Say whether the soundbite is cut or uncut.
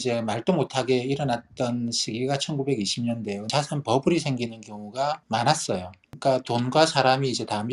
cut